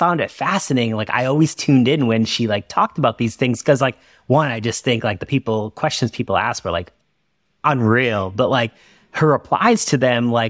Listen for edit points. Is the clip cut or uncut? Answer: uncut